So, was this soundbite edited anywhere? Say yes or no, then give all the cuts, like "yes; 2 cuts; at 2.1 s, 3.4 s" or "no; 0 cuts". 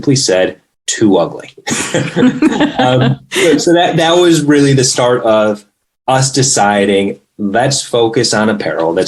no; 0 cuts